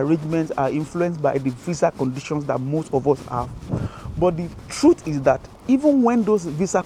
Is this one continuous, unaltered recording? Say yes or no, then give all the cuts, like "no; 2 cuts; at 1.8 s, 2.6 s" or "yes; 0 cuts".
yes; 0 cuts